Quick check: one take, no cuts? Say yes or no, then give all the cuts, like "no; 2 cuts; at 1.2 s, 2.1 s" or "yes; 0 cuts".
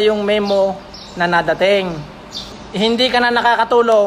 no; 1 cut; at 2.6 s